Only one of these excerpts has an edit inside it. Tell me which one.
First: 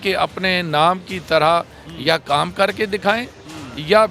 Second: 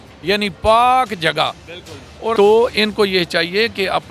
second; 1 cut; at 2.3 s

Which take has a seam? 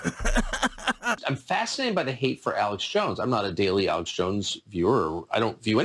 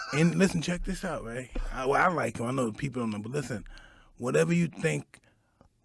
first; 1 cut; at 1.2 s

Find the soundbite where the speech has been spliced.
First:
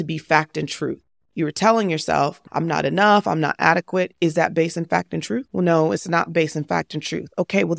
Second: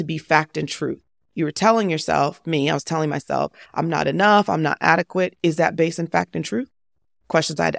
first; 2 cuts; at 2.4 s, 5.5 s

